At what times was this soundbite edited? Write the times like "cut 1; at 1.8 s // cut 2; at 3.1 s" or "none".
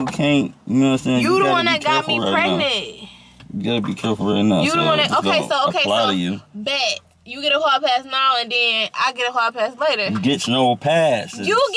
none